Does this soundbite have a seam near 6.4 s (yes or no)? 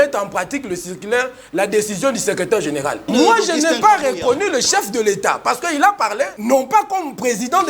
yes